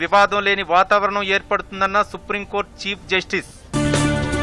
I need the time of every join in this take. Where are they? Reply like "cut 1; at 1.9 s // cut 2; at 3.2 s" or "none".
none